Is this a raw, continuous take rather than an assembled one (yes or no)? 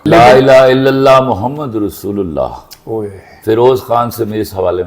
yes